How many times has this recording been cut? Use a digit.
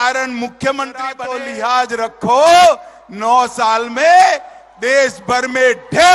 1